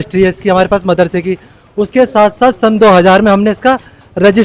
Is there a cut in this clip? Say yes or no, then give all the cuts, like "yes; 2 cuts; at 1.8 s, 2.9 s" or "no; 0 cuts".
no; 0 cuts